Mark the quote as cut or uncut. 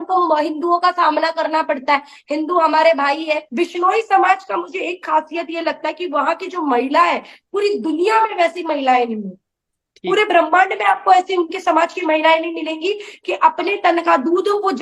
cut